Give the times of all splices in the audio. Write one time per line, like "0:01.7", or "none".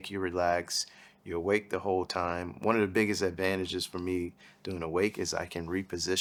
none